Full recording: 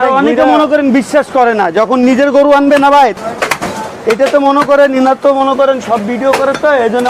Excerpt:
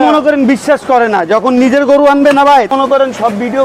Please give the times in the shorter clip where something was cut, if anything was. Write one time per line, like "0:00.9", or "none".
0:02.7